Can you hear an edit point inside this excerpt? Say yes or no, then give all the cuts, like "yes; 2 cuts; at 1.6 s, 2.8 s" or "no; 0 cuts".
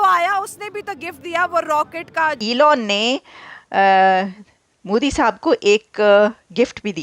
yes; 1 cut; at 2.4 s